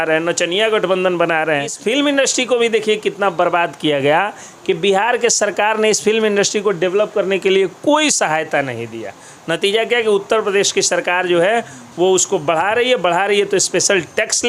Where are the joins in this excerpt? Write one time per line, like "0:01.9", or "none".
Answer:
0:01.8